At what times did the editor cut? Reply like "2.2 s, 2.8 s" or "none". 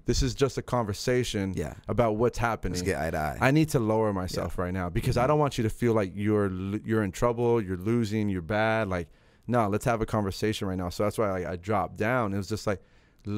none